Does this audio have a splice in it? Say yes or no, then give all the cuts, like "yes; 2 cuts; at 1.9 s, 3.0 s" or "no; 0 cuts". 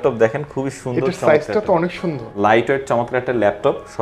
yes; 1 cut; at 2.3 s